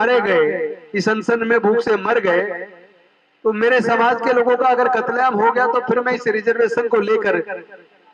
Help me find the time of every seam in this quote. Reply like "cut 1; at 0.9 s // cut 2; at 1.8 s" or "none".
none